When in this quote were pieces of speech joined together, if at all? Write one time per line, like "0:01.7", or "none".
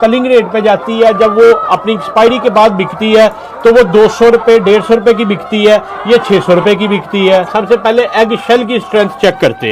0:07.5